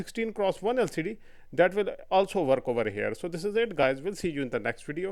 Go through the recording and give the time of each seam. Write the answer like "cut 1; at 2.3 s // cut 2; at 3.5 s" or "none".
none